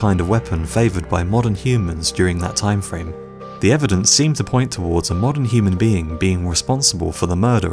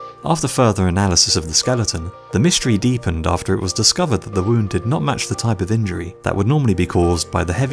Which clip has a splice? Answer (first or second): second